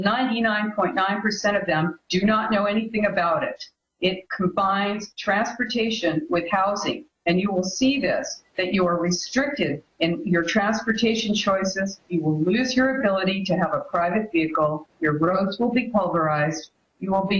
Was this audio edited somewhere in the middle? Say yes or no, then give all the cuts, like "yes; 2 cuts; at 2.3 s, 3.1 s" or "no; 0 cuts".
yes; 1 cut; at 3.6 s